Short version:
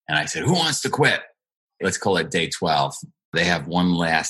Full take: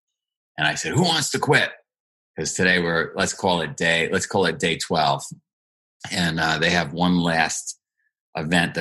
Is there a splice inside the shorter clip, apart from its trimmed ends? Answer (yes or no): yes